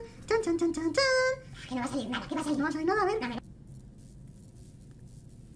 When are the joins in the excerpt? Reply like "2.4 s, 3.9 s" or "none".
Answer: 3.4 s

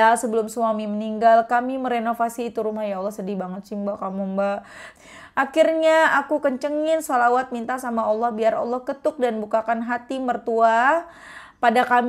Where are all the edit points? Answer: 4.8 s

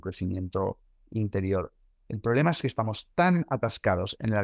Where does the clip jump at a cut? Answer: none

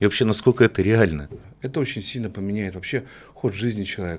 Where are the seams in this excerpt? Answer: 1.4 s

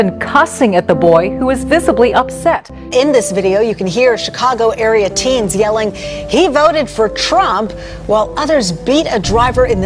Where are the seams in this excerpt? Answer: none

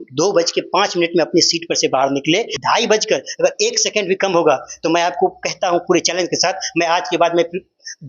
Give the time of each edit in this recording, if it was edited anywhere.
2.5 s

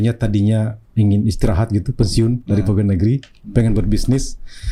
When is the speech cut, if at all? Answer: none

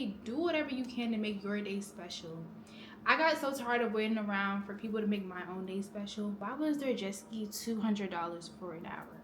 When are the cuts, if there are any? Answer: 6.4 s

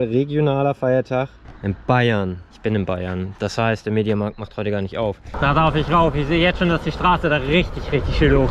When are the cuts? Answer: 1.5 s, 2.5 s, 5.3 s

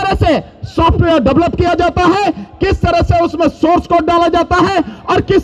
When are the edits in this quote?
none

